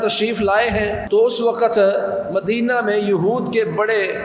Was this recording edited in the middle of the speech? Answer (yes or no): yes